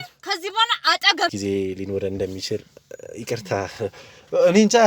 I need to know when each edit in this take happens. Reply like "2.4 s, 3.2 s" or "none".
1.3 s